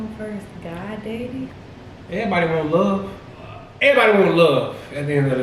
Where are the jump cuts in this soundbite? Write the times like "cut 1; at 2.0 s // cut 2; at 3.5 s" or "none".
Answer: cut 1; at 1.6 s // cut 2; at 3.6 s

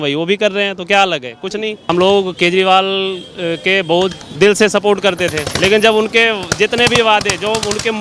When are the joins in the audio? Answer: cut 1; at 1.9 s // cut 2; at 4.2 s // cut 3; at 5.5 s

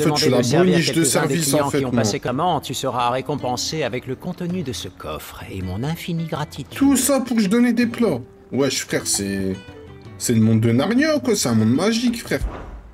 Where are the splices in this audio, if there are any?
cut 1; at 2.3 s

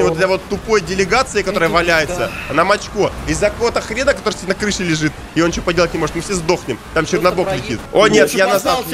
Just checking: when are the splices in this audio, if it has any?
none

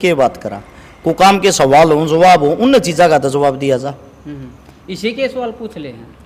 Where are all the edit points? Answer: none

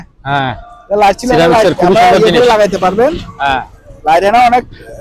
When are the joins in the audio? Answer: none

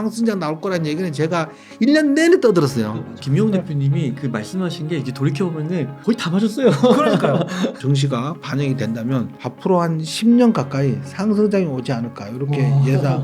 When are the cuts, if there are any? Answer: cut 1; at 3.1 s // cut 2; at 5.9 s // cut 3; at 7.8 s // cut 4; at 9.4 s

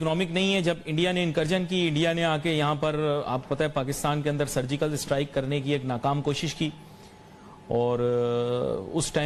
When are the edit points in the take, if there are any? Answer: none

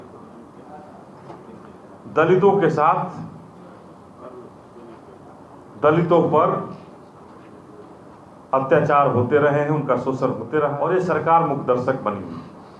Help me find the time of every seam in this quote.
cut 1; at 10.8 s

